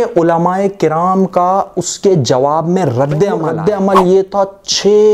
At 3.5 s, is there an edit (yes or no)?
yes